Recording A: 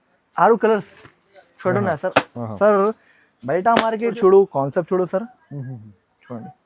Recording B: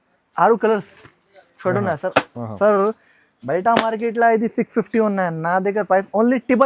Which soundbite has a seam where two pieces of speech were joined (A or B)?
A